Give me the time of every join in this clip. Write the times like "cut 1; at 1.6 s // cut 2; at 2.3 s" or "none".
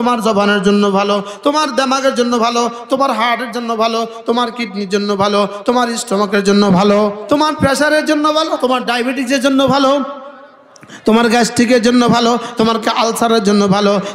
cut 1; at 7.2 s // cut 2; at 8.6 s